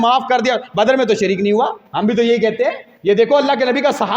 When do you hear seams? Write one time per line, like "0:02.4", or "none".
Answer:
0:01.8
0:02.9